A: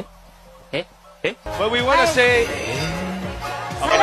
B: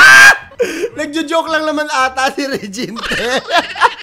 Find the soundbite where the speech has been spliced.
A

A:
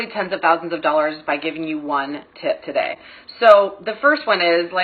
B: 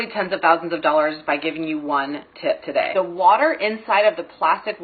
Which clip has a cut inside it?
B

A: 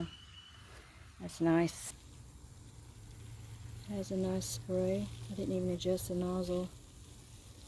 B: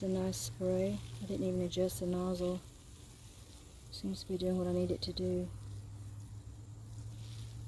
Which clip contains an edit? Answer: A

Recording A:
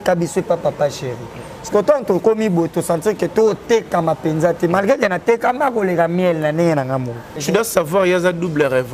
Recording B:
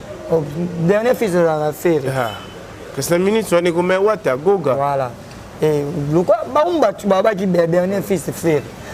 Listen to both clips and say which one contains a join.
A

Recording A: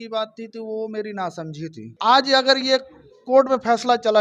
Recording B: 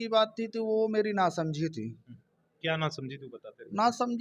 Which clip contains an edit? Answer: A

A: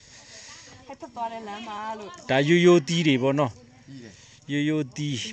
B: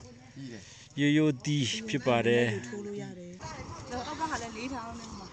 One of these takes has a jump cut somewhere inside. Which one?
B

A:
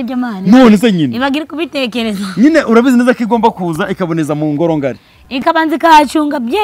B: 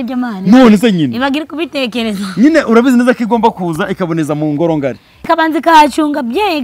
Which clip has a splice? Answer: B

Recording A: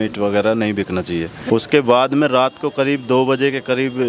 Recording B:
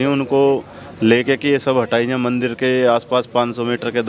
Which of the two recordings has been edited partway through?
A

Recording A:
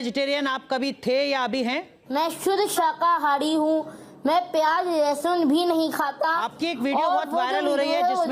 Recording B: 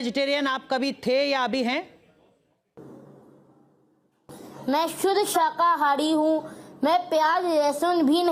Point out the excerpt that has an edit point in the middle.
A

